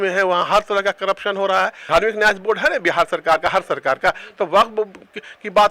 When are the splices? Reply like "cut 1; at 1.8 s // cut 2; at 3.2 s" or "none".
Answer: cut 1; at 1.8 s

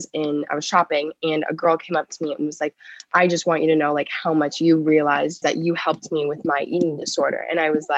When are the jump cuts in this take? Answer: cut 1; at 5.4 s

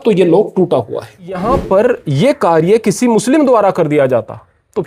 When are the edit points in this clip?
cut 1; at 1.4 s

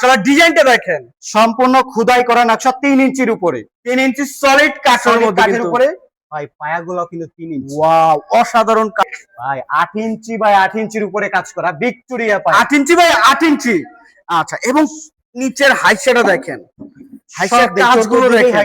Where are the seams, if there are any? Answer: cut 1; at 9.0 s

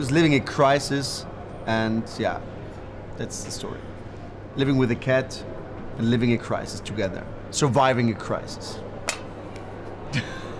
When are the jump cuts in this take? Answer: cut 1; at 4.8 s

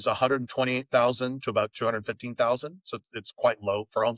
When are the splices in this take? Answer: none

